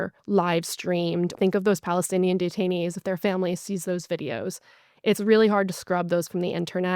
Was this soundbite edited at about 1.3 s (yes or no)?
yes